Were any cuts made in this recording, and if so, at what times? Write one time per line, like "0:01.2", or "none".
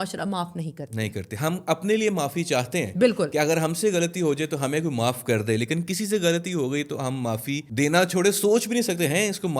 0:07.7